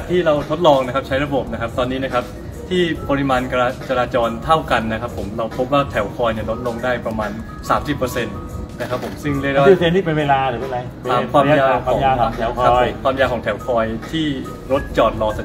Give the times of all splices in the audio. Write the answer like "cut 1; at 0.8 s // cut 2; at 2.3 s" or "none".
none